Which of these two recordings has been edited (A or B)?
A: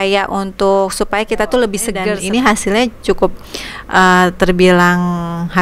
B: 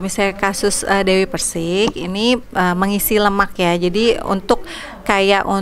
A